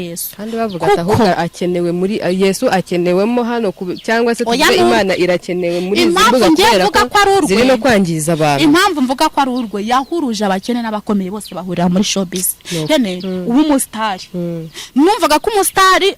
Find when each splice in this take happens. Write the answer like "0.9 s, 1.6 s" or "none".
12.8 s